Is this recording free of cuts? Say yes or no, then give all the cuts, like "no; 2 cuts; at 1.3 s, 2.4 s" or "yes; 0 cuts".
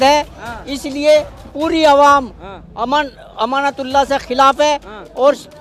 yes; 0 cuts